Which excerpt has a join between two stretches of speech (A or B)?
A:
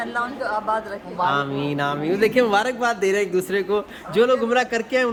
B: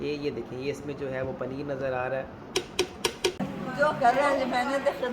B